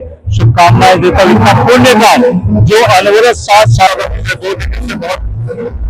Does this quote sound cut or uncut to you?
cut